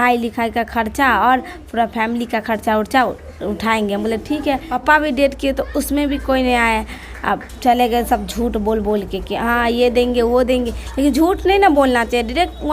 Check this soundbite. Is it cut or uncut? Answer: cut